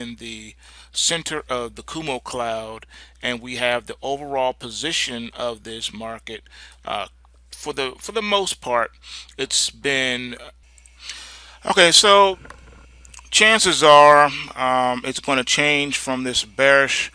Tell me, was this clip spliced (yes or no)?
yes